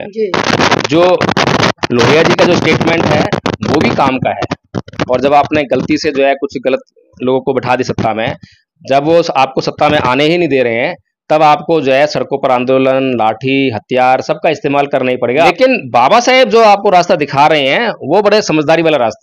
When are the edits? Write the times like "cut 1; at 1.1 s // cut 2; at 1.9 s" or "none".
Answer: cut 1; at 4.8 s // cut 2; at 15.5 s